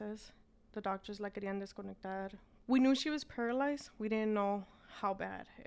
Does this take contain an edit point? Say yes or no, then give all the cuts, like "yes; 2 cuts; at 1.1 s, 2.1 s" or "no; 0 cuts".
yes; 1 cut; at 2.5 s